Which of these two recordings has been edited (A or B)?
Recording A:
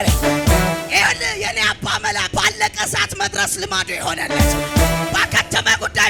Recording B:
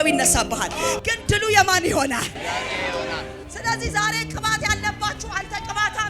B